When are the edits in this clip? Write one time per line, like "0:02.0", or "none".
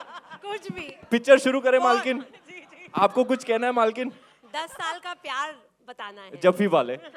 none